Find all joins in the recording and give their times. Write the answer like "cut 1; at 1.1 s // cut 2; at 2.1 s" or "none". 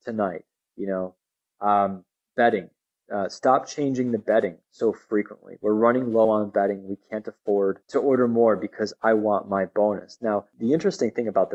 cut 1; at 7.8 s // cut 2; at 10.5 s